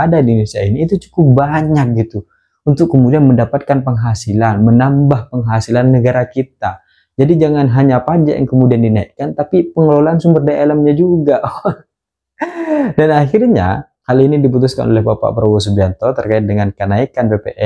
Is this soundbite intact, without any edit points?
yes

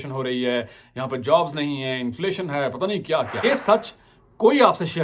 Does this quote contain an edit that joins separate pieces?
yes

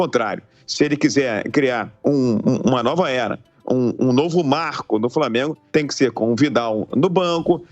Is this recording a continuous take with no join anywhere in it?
no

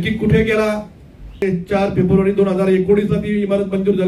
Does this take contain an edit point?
yes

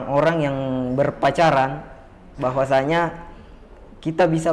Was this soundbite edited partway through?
no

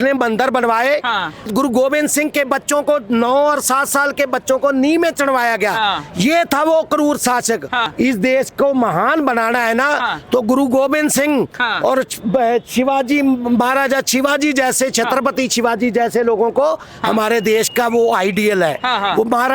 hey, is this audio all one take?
no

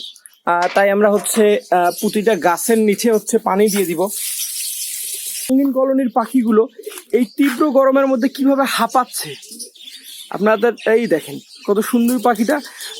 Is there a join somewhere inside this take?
yes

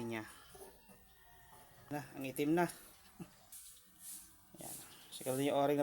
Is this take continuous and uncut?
no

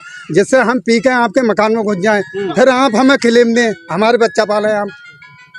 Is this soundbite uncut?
yes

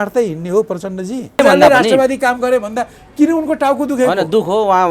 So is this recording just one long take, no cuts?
no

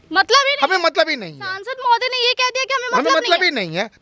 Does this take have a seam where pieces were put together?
no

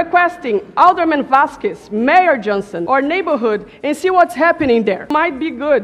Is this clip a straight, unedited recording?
yes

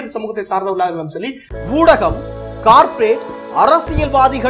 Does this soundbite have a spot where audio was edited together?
yes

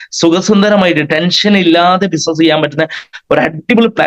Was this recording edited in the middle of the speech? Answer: no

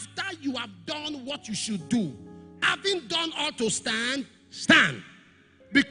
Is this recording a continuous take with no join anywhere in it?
yes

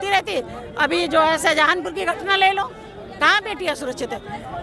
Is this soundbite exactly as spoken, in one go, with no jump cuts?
yes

